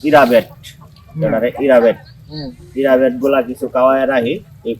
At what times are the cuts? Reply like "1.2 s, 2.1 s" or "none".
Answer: none